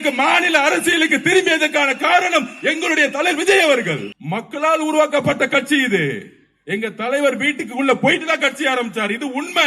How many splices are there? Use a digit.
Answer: 1